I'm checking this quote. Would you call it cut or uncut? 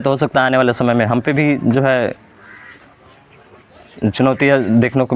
uncut